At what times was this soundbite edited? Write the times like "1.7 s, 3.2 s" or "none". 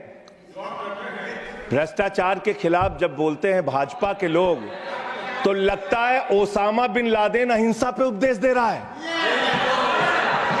none